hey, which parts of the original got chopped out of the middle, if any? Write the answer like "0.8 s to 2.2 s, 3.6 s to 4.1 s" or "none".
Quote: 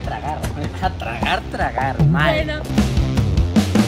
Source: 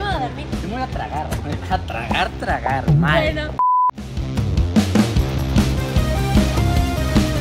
3.6 s to 3.9 s